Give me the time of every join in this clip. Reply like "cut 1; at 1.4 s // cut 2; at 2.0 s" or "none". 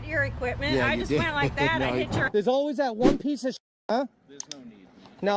cut 1; at 2.2 s